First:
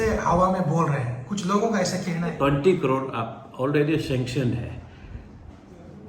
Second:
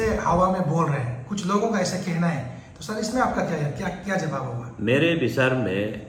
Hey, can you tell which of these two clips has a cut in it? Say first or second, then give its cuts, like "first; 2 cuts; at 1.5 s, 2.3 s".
first; 1 cut; at 2.3 s